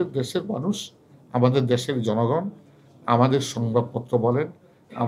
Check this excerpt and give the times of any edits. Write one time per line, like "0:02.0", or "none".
none